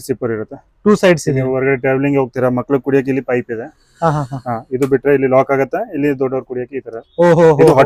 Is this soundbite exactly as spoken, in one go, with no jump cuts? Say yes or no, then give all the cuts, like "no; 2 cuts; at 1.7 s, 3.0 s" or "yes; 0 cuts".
yes; 0 cuts